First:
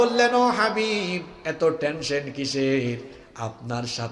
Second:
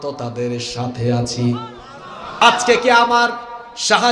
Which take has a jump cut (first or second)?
second